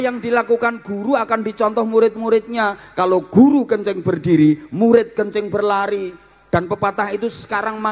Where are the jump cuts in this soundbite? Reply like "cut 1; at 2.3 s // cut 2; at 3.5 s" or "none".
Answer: none